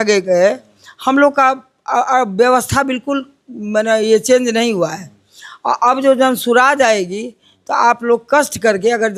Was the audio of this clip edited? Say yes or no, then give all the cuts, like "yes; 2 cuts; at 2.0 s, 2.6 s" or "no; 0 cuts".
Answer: no; 0 cuts